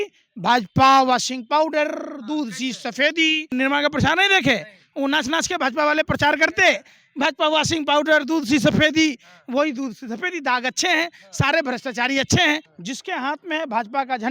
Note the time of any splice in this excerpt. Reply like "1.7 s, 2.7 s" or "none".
3.5 s, 12.7 s